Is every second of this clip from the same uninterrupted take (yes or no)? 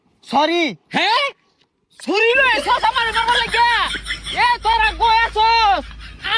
yes